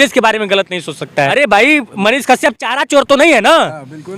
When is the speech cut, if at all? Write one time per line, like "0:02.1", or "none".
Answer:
0:01.3